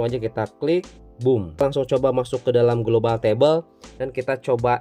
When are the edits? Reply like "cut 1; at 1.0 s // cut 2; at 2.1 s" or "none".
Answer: cut 1; at 1.6 s